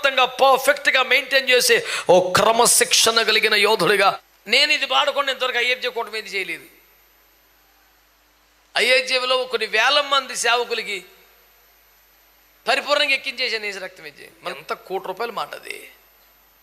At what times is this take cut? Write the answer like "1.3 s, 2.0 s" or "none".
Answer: 4.3 s, 14.5 s